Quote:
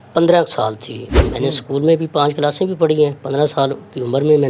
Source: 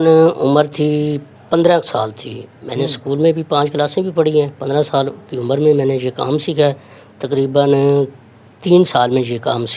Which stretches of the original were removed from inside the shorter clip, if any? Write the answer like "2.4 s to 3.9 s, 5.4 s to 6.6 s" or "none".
none